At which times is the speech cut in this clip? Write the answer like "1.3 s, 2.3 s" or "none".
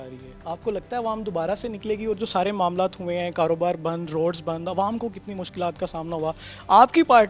none